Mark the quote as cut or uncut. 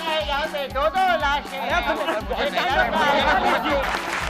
uncut